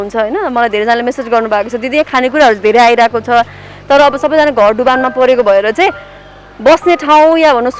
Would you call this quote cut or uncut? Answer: uncut